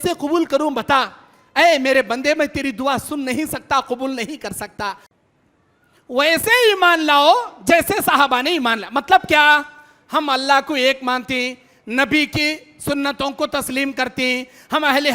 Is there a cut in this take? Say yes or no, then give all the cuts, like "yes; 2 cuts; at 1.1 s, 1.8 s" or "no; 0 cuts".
yes; 1 cut; at 5.1 s